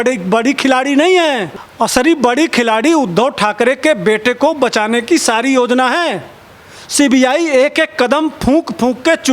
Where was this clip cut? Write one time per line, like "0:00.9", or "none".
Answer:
none